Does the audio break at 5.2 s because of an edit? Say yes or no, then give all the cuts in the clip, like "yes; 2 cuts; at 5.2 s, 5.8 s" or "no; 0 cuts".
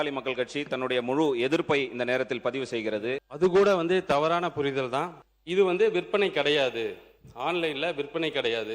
yes; 2 cuts; at 3.3 s, 5.2 s